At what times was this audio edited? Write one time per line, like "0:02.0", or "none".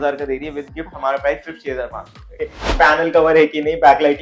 0:02.6